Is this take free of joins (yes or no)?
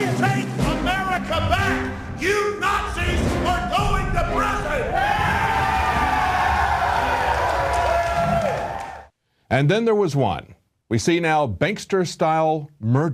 no